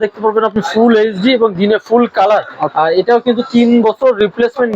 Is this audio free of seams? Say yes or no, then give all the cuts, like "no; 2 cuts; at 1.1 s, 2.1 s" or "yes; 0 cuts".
no; 1 cut; at 2.7 s